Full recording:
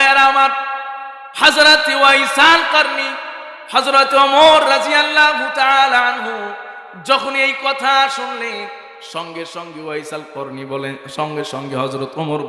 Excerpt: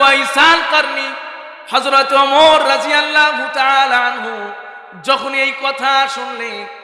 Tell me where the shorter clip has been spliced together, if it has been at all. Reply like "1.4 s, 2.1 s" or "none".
none